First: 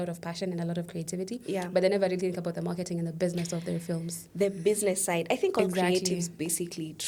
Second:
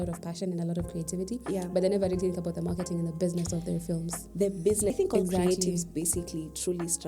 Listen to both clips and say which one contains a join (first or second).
second